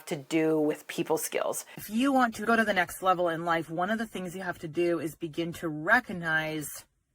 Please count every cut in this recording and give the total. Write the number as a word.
one